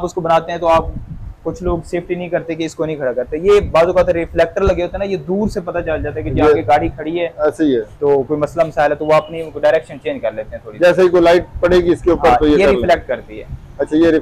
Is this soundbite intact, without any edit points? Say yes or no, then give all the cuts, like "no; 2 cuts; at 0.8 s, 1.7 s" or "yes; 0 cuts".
yes; 0 cuts